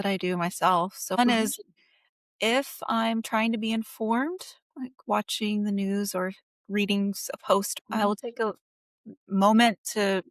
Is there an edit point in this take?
yes; 2 cuts; at 1.2 s, 7.7 s

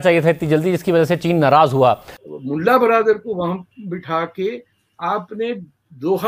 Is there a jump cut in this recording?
yes; 1 cut; at 2.1 s

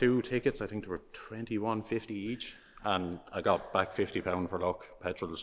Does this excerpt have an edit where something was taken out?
no; 0 cuts

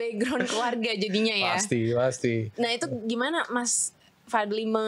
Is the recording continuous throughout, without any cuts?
yes; 0 cuts

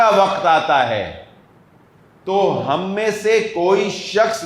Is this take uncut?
yes; 0 cuts

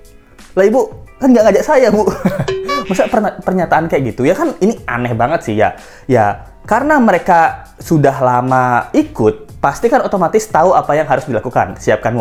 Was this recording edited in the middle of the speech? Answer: no; 0 cuts

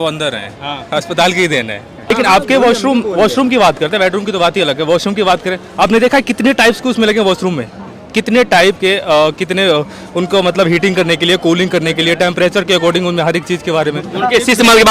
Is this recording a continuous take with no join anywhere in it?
no; 1 cut; at 2.1 s

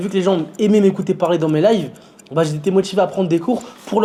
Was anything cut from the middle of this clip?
no; 0 cuts

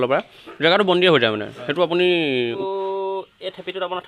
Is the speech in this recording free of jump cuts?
no; 1 cut; at 2.6 s

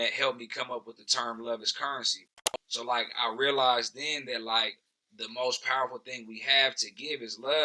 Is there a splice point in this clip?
yes; 1 cut; at 2.2 s

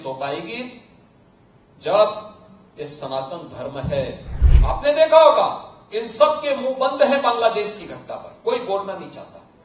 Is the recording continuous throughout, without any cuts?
no; 1 cut; at 4.3 s

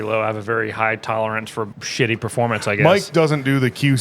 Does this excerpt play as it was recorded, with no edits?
no; 1 cut; at 1.8 s

